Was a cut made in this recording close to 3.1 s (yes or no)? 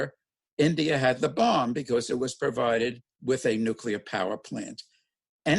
yes